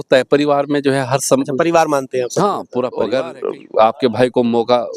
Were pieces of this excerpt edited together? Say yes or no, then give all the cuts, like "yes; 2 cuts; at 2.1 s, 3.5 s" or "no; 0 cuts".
yes; 1 cut; at 2.9 s